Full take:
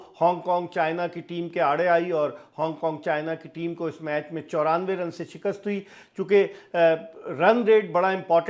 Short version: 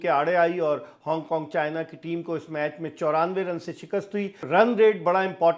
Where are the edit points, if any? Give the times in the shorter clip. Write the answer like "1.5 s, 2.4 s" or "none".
4.4 s